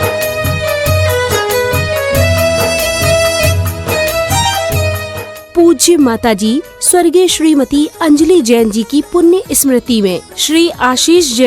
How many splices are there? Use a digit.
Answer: 1